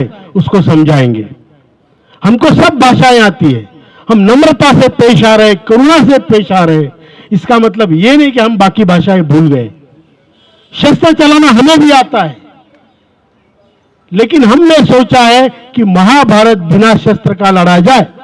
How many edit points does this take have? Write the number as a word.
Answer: zero